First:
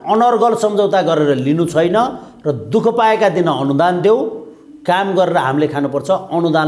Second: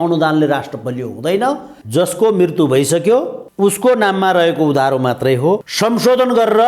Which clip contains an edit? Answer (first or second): second